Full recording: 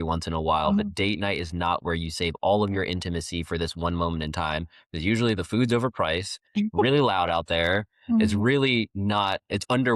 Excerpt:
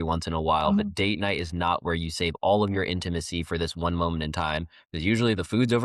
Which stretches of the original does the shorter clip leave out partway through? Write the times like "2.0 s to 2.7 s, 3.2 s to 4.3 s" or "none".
none